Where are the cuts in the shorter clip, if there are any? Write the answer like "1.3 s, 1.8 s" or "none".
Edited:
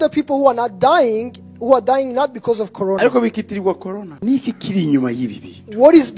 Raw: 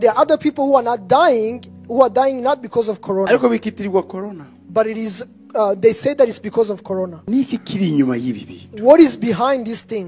4.1 s